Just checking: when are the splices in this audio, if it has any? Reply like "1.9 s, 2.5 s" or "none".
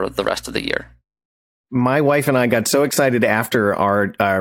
1.4 s